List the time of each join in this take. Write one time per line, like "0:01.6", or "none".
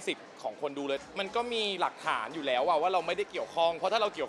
0:01.0

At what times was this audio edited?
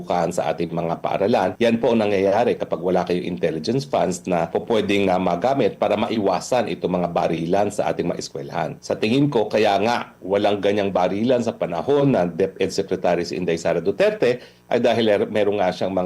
0:01.5
0:04.5
0:08.8

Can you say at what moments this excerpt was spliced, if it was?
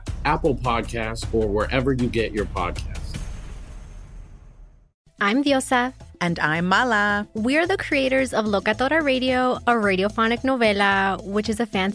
0:05.0

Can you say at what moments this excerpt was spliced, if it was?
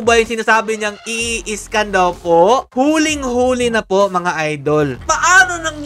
0:02.7
0:05.0

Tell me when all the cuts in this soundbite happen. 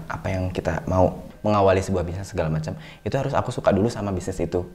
0:01.3

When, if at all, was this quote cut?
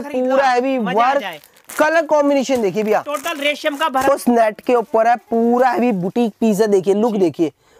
0:04.1

